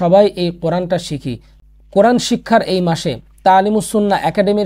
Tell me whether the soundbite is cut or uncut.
uncut